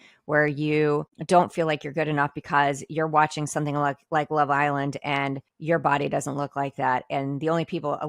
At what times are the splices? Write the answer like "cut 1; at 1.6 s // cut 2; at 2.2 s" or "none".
cut 1; at 1.1 s // cut 2; at 5.5 s